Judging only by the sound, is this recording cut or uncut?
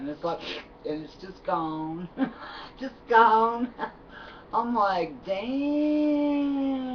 cut